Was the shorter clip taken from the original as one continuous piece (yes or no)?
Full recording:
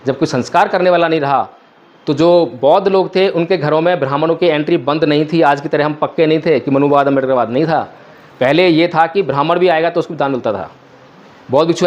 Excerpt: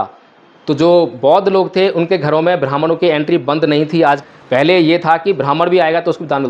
no